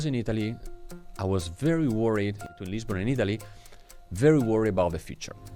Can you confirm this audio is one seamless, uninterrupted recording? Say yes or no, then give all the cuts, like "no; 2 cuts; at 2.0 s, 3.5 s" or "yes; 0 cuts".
no; 1 cut; at 2.4 s